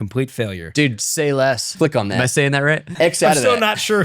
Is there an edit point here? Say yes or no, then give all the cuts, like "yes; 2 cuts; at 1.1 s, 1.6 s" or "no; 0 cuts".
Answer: yes; 3 cuts; at 0.7 s, 1.7 s, 2.9 s